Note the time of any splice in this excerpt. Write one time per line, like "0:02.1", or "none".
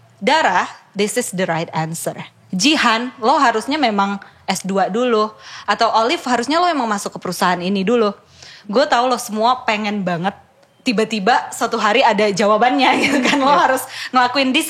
none